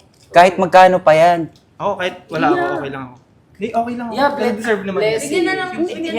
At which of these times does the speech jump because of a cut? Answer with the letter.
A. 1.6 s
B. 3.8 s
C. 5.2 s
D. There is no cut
A